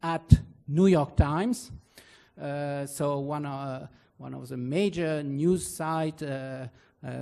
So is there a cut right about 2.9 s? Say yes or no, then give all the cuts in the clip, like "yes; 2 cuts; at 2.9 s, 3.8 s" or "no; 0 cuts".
no; 1 cut; at 5.2 s